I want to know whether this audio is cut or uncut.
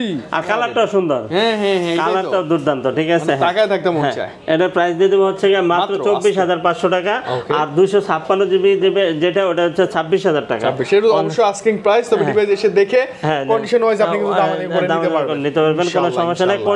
uncut